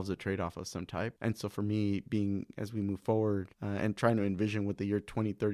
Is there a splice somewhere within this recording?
yes; 2 cuts; at 1.1 s, 3.6 s

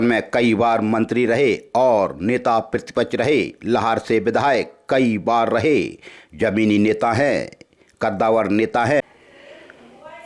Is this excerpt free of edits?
no; 1 cut; at 9.0 s

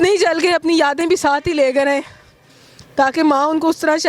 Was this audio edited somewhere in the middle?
no; 0 cuts

